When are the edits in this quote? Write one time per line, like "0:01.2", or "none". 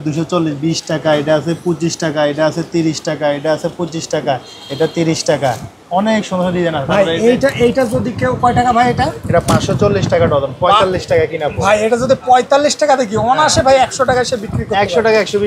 none